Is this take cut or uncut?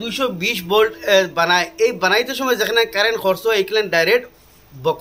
uncut